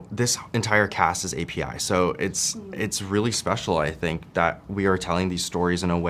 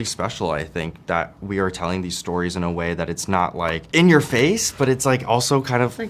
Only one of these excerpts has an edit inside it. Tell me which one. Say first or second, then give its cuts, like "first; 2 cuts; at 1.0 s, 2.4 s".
second; 1 cut; at 3.8 s